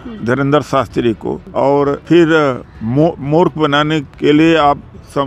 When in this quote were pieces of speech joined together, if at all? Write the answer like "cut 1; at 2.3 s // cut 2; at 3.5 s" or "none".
cut 1; at 1.7 s // cut 2; at 4.1 s